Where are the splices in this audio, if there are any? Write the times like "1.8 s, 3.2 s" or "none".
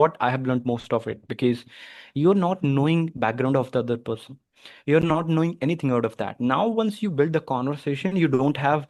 none